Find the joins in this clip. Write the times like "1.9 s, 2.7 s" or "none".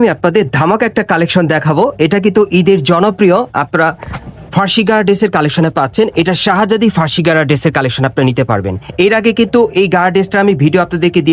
none